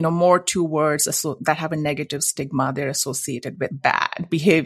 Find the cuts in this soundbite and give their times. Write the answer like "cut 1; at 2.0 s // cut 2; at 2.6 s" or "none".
cut 1; at 3.7 s